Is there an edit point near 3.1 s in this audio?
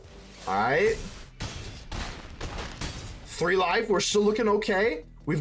no; 1 cut; at 1.2 s

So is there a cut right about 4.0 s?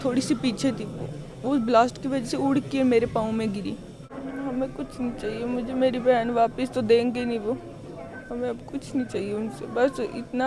yes; 1 cut; at 4.0 s

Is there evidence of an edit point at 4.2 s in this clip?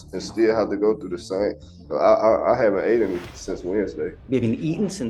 yes; 1 cut; at 4.2 s

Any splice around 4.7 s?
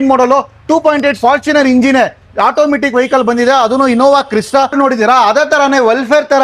yes; 1 cut; at 4.7 s

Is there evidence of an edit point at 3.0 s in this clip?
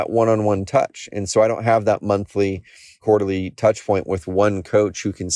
yes; 1 cut; at 3.0 s

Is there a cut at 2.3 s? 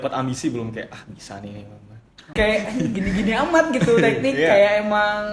yes; 1 cut; at 2.3 s

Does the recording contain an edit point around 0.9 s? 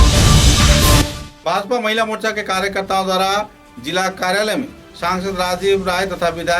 yes; 1 cut; at 0.9 s

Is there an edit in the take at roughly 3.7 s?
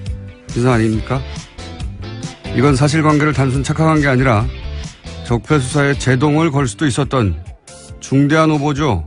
no; 1 cut; at 5.4 s

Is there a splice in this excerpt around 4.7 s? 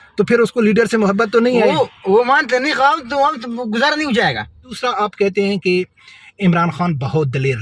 yes; 1 cut; at 4.7 s

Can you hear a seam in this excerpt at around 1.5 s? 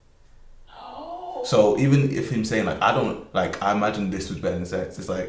no; 0 cuts

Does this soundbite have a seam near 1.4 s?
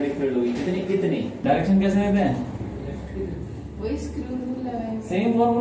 yes; 1 cut; at 1.4 s

